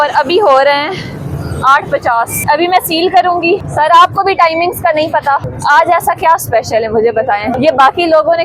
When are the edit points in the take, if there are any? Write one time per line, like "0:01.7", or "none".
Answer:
0:02.4
0:03.7
0:05.5
0:07.6